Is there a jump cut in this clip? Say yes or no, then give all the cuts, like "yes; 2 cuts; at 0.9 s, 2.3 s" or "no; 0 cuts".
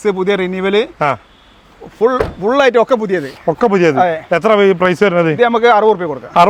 no; 0 cuts